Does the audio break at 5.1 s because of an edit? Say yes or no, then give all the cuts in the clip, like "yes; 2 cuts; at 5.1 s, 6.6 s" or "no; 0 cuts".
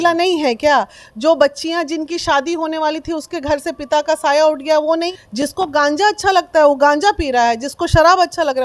yes; 1 cut; at 5.1 s